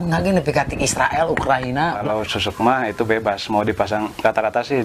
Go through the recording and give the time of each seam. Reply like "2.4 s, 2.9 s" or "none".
2.0 s